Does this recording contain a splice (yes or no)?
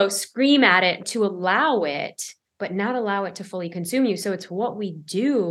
yes